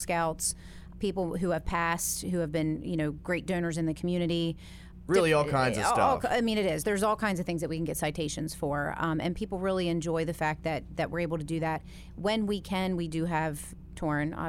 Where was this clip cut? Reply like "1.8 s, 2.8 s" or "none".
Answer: none